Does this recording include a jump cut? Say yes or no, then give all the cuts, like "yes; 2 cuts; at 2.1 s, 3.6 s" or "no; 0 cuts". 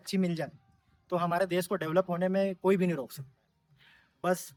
no; 0 cuts